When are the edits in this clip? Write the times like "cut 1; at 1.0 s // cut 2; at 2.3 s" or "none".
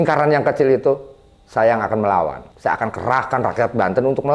cut 1; at 2.5 s